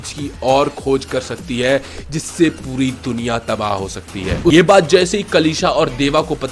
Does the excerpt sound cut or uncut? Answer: cut